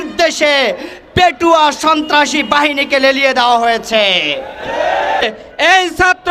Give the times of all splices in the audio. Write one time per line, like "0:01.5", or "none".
0:05.4